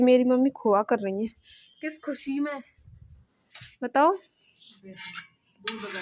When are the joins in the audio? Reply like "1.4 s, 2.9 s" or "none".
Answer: none

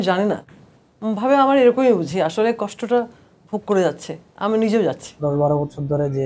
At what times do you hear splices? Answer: 5.2 s

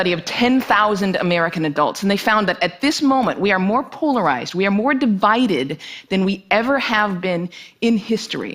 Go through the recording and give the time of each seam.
5.8 s

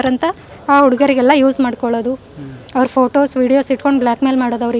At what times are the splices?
none

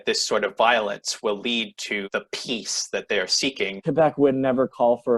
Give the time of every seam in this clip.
3.8 s

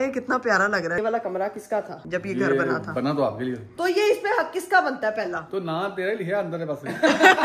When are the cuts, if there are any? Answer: 1.0 s, 2.0 s, 3.7 s

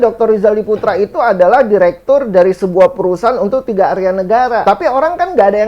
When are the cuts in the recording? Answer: 4.6 s

